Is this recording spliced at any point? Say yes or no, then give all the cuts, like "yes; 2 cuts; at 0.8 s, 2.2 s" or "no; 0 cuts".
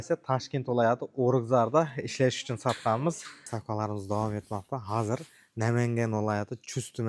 yes; 1 cut; at 3.5 s